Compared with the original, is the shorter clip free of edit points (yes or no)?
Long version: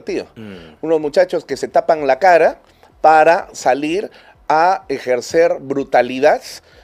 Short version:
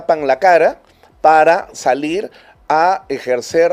yes